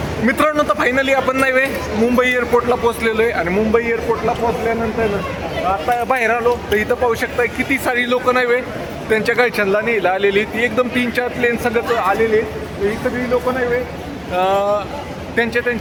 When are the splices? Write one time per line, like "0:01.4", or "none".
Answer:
none

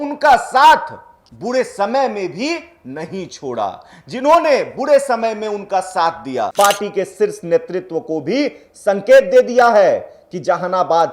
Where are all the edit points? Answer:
0:06.5

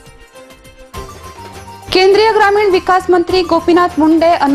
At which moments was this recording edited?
0:01.0
0:01.8

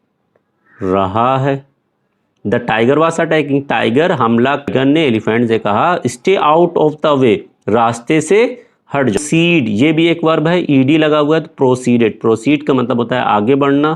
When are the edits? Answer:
0:04.7
0:09.2

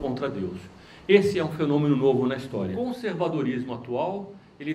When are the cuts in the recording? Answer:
0:02.7

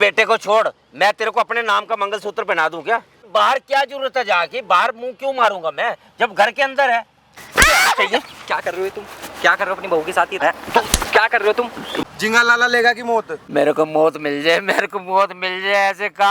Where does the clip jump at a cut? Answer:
0:03.3
0:07.4
0:10.4
0:11.8
0:13.4

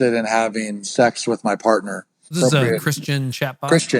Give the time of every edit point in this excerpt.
0:02.4

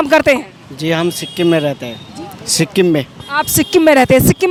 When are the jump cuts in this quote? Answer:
none

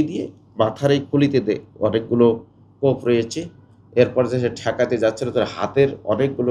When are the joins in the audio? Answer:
none

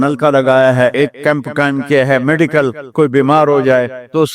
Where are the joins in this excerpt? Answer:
0:00.9

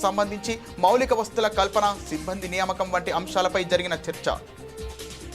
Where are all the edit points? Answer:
0:04.4

